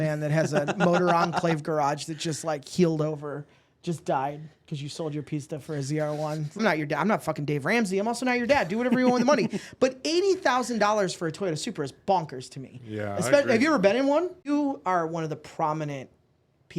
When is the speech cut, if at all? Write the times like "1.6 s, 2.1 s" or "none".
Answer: 6.6 s, 14.5 s